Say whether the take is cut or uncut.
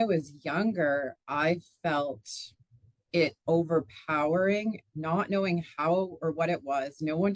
uncut